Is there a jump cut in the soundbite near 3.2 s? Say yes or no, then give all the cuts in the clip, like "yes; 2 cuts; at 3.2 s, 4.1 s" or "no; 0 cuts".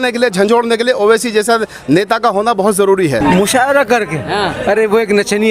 yes; 1 cut; at 3.2 s